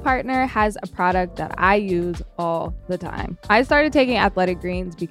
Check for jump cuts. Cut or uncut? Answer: cut